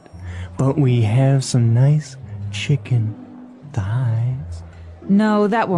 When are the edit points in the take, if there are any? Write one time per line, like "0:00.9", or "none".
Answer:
none